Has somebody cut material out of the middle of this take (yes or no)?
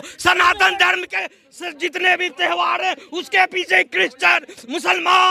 no